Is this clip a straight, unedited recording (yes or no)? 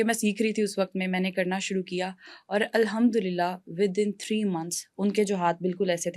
yes